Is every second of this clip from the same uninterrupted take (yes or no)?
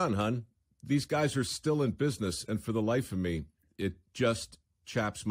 yes